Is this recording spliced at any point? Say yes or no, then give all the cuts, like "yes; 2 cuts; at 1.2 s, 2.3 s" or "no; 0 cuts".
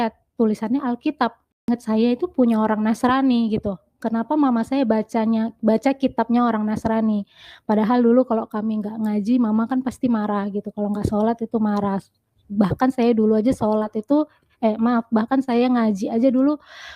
yes; 1 cut; at 1.7 s